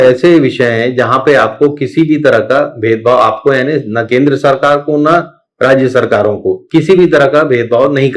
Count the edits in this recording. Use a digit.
1